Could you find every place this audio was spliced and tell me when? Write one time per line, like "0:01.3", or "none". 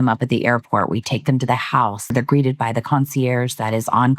0:02.1